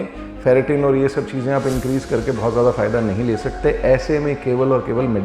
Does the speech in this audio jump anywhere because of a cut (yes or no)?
no